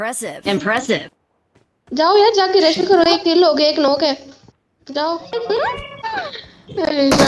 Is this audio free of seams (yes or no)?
no